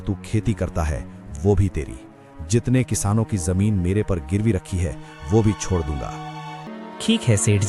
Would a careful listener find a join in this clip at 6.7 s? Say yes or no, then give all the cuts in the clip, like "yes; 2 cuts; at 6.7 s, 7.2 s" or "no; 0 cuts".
yes; 1 cut; at 6.7 s